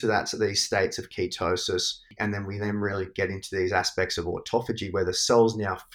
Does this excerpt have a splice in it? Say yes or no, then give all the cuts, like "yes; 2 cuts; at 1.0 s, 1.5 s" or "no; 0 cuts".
yes; 1 cut; at 2.1 s